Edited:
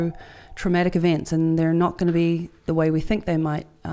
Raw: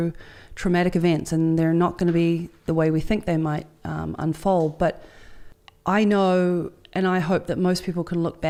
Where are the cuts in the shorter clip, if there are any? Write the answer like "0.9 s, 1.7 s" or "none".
none

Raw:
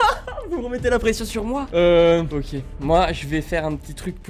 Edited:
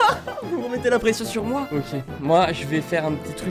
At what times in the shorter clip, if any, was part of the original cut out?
1.7 s

